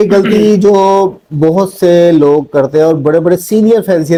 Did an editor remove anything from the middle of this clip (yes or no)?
no